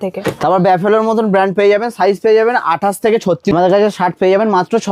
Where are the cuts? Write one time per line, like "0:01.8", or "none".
0:03.5

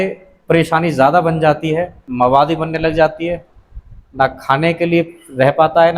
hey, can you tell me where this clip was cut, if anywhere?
0:02.0

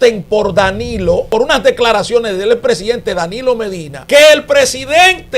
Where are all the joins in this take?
0:01.3
0:03.9

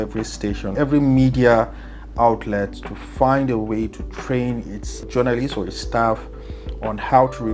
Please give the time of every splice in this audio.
0:00.7
0:05.0

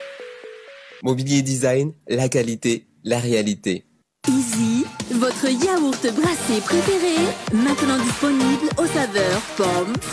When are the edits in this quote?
0:04.0

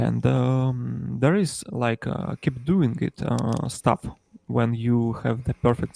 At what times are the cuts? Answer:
none

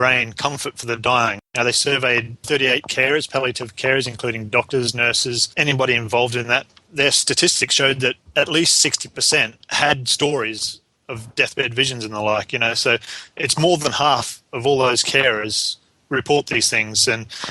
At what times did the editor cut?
0:01.4
0:02.4
0:05.5
0:06.8
0:08.2
0:09.7

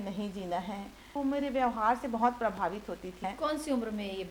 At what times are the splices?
0:01.1
0:03.2

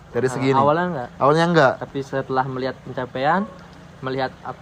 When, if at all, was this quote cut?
none

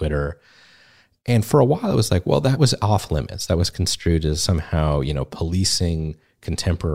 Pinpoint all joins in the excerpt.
0:02.6
0:04.4

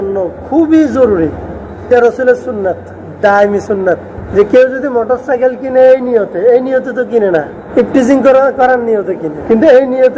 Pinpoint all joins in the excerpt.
0:01.9
0:04.2
0:07.6
0:09.3

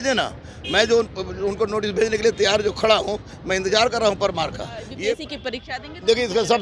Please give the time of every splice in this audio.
0:05.2

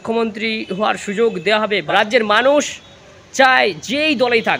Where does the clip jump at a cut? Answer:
0:01.8

